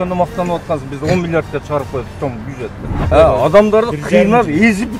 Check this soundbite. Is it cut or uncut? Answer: cut